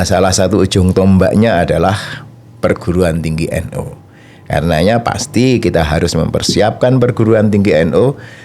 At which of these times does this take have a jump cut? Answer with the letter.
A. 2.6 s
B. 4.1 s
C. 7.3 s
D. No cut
D